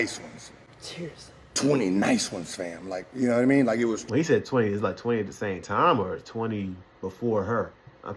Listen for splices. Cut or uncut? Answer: uncut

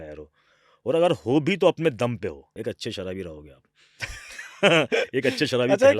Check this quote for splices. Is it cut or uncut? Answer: cut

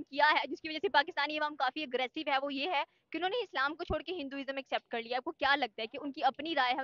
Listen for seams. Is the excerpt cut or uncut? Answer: uncut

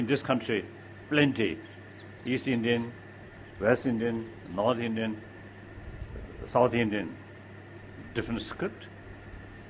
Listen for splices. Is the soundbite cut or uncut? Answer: cut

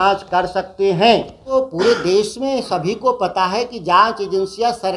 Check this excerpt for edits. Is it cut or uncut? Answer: cut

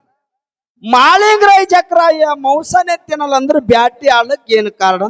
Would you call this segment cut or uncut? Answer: uncut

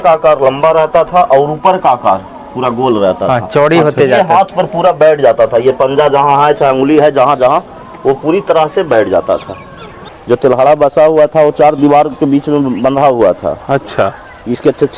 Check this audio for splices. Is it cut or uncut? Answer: cut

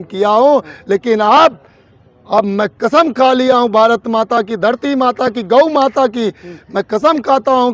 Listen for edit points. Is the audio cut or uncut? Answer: uncut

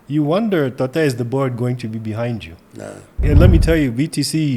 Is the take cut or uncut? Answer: cut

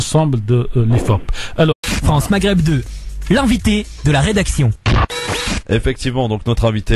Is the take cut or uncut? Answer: uncut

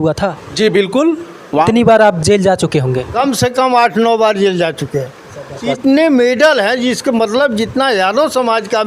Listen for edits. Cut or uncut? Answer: cut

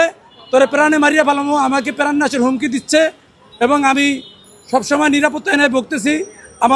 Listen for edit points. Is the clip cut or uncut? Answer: uncut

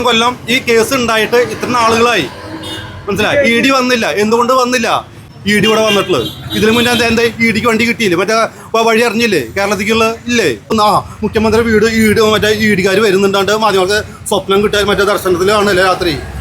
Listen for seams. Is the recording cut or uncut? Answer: cut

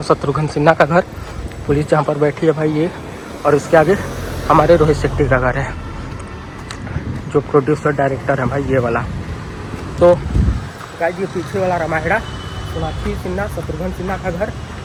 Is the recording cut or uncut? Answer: uncut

